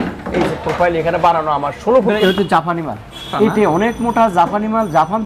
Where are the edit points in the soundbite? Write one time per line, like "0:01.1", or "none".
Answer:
0:02.2
0:03.3